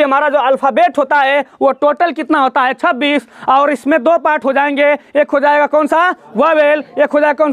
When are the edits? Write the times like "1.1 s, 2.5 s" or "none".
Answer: none